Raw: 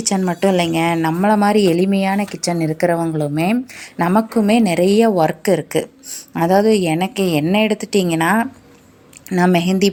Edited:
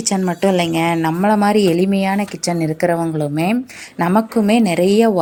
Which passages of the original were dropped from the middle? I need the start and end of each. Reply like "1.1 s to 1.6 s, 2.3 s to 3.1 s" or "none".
none